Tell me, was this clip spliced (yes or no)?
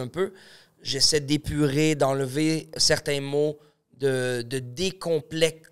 no